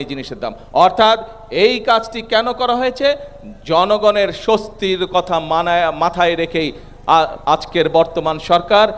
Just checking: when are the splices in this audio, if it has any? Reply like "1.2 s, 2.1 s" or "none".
none